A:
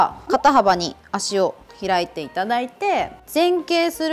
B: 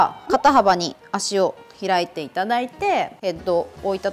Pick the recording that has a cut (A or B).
A